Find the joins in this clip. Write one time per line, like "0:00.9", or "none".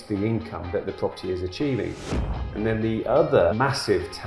0:02.1
0:03.5